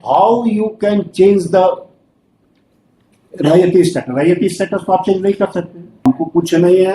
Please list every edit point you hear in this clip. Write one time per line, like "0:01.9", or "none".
0:06.0